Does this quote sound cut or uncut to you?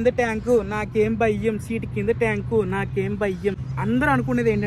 uncut